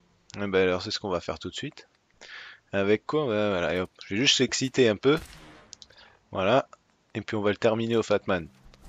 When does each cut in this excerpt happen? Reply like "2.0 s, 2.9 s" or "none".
3.3 s